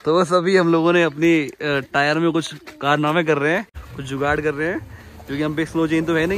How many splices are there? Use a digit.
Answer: 0